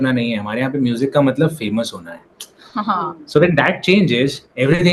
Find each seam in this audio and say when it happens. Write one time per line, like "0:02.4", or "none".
none